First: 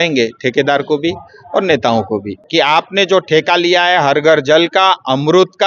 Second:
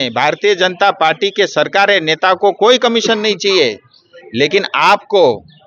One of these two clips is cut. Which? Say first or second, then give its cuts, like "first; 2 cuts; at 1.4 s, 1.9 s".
first; 1 cut; at 2.4 s